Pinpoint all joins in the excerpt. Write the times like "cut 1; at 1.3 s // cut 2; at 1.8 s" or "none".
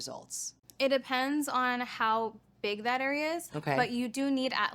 none